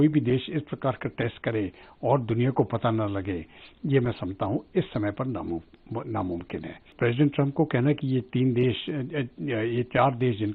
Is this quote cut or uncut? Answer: cut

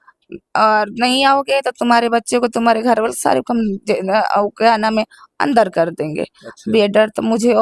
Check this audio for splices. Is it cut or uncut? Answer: uncut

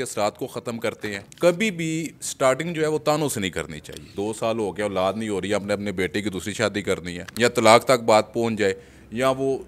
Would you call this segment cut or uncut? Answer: cut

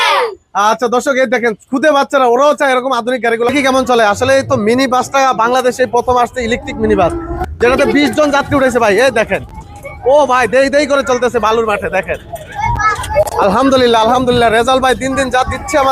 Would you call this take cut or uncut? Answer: cut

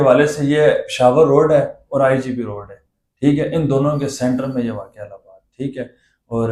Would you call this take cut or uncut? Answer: uncut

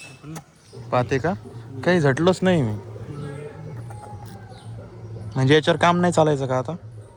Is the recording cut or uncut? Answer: uncut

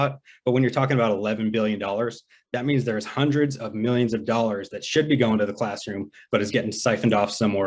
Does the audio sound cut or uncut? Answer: uncut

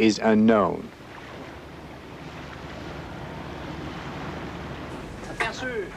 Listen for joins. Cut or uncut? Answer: uncut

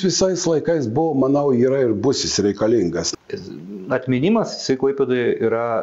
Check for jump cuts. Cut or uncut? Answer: cut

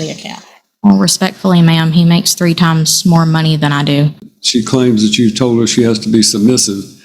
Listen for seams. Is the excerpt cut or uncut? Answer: cut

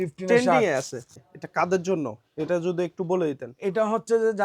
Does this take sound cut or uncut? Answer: cut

